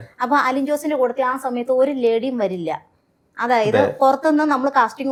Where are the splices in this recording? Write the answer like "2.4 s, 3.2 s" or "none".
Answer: none